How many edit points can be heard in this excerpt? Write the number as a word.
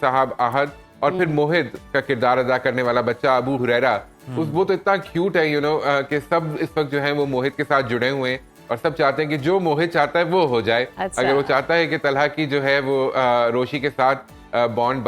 zero